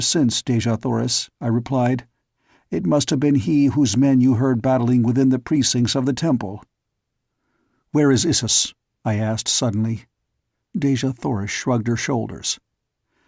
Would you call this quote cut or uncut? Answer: uncut